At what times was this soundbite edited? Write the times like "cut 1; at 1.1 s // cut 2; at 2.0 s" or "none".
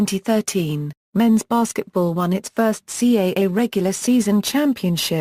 cut 1; at 2.9 s